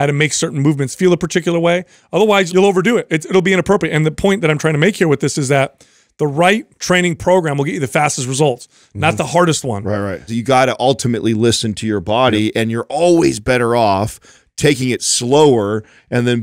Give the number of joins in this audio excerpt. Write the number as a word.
three